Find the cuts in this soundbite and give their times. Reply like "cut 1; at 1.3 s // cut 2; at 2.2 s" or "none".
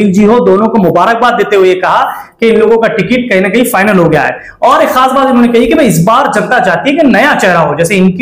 none